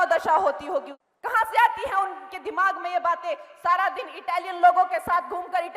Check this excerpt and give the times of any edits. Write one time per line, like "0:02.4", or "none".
0:01.0